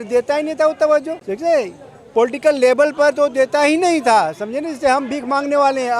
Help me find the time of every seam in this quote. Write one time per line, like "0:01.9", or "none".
0:01.2